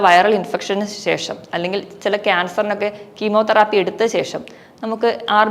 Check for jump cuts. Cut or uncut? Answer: uncut